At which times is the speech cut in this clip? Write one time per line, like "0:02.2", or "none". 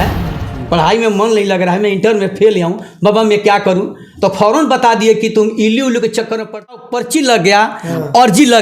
0:06.7